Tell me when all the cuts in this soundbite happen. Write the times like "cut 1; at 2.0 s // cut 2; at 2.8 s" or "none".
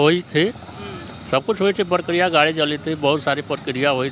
none